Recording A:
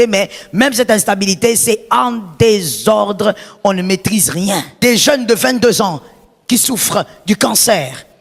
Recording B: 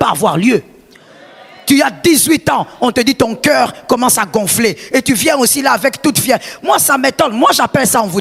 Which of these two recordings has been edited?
A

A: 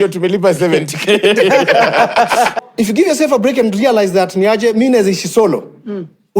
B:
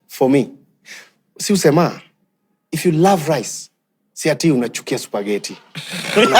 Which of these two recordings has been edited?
A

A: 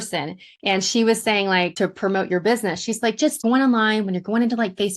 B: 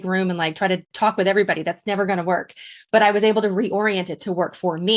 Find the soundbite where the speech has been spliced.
A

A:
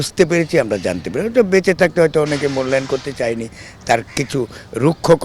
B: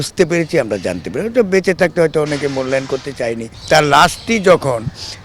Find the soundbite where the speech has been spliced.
B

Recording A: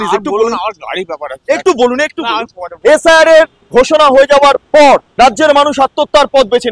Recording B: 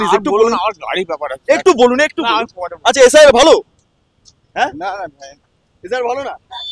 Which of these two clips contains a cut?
A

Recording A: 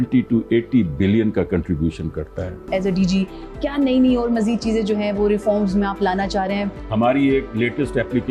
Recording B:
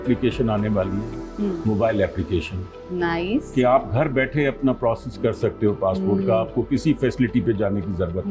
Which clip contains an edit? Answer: A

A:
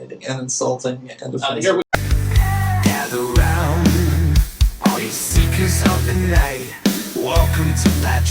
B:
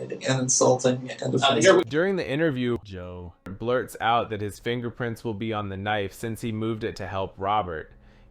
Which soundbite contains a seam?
A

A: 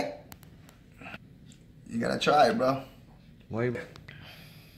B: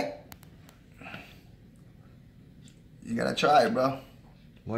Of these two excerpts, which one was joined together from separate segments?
A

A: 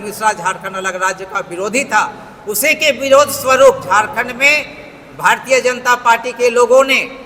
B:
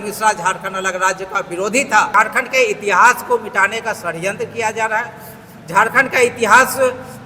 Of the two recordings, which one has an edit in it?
B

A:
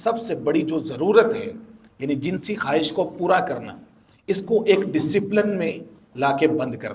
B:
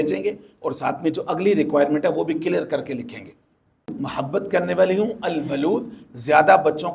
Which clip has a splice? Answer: B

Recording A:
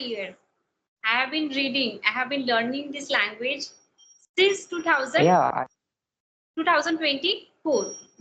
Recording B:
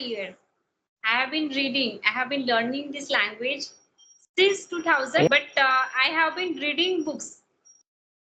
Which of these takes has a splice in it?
B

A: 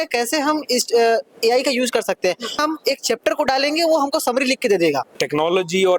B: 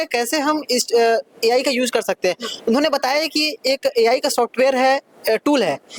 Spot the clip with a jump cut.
A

